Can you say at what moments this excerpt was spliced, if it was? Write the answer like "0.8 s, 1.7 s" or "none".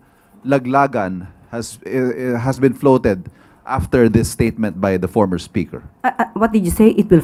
none